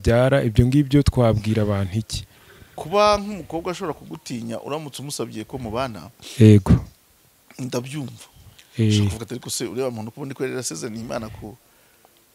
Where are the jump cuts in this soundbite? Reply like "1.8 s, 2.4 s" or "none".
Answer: none